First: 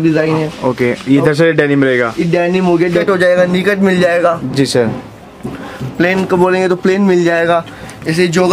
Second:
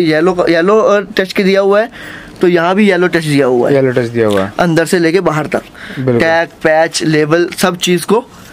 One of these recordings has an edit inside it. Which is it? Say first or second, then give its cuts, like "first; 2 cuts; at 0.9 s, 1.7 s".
first; 1 cut; at 3.0 s